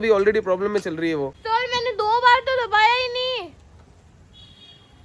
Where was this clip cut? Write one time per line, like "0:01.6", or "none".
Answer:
0:01.3